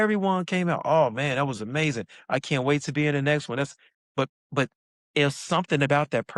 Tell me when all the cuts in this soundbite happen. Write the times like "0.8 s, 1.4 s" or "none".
4.4 s